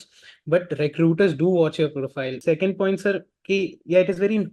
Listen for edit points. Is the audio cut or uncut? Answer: cut